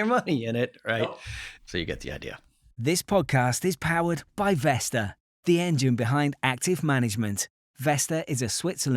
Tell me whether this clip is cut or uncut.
cut